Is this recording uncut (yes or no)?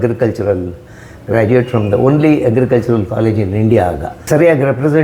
no